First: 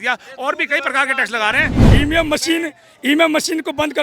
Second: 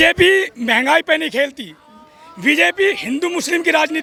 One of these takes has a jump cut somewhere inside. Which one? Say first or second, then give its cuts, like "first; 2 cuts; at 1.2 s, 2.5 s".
first; 1 cut; at 1.8 s